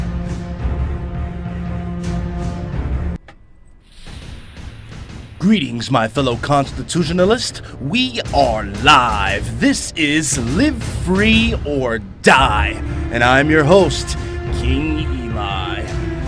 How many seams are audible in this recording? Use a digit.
0